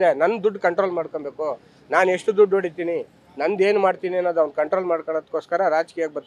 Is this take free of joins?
yes; 0 cuts

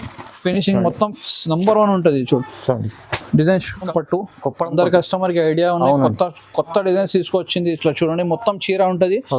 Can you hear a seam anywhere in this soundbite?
yes; 1 cut; at 3.9 s

